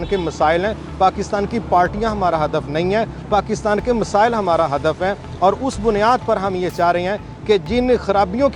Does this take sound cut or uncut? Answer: uncut